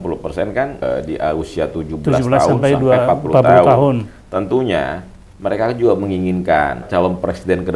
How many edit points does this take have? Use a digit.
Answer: 2